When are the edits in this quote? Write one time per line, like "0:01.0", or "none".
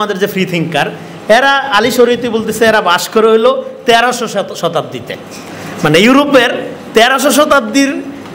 none